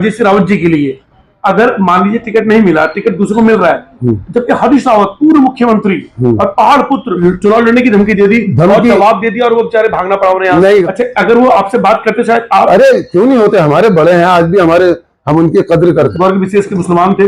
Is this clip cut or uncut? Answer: cut